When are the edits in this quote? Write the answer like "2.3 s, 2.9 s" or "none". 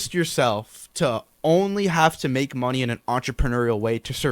none